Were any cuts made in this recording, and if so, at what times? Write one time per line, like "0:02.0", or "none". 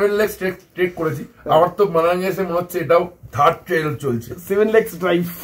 0:03.2